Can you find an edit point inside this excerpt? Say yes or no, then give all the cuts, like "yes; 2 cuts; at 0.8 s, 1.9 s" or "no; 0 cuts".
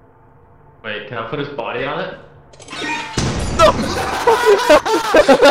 yes; 1 cut; at 3.1 s